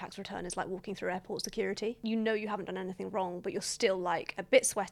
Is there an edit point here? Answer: no; 0 cuts

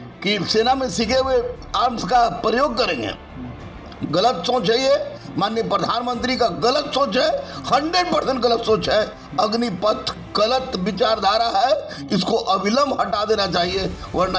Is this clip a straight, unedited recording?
yes; 0 cuts

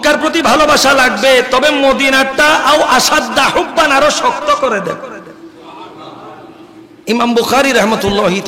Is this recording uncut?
no; 1 cut; at 6.9 s

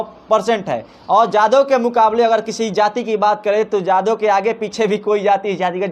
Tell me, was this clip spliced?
no; 0 cuts

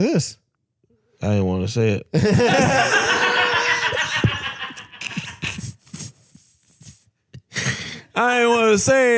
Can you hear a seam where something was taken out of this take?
no; 0 cuts

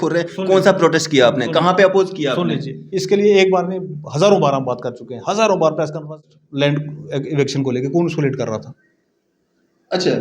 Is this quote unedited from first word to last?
no; 1 cut; at 6.1 s

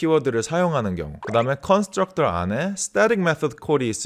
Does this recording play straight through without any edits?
no; 1 cut; at 1.1 s

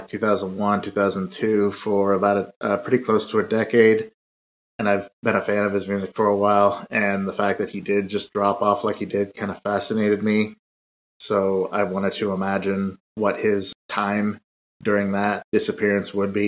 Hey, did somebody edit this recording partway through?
yes; 2 cuts; at 13.3 s, 15.4 s

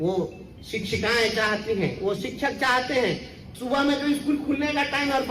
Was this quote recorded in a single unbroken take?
no; 1 cut; at 3.4 s

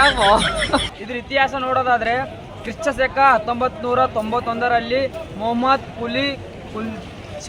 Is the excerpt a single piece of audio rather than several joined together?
yes; 0 cuts

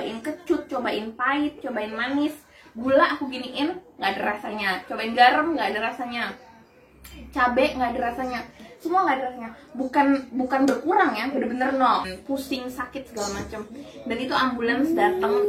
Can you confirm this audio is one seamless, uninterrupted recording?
no; 1 cut; at 12.1 s

